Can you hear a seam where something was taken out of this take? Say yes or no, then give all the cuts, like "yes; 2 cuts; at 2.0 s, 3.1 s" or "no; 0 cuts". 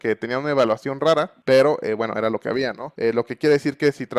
yes; 2 cuts; at 1.3 s, 2.8 s